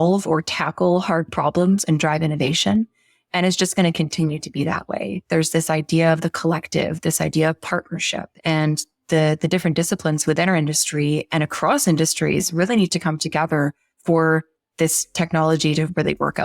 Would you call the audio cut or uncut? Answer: cut